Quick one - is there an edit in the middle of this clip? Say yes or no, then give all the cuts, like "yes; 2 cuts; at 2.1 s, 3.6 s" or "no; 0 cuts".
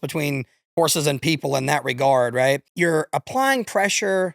yes; 1 cut; at 2.7 s